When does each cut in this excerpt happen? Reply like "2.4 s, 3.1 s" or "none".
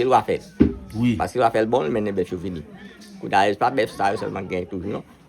4.4 s